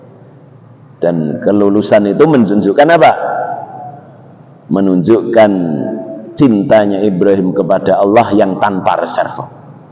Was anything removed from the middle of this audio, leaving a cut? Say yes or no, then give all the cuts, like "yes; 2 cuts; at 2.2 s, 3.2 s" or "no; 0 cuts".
no; 0 cuts